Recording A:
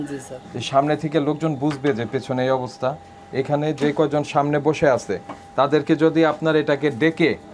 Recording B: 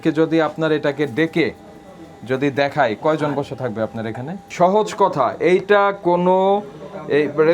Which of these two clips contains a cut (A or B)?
B